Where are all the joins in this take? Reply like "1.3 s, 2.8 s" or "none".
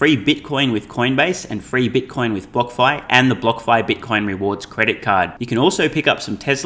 none

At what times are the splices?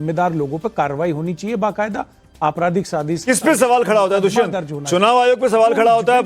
none

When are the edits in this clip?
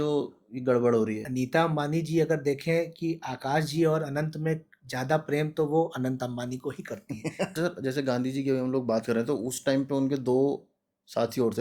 1.2 s, 7.4 s

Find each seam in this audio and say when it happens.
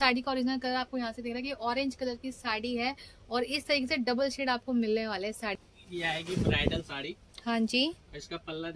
5.6 s

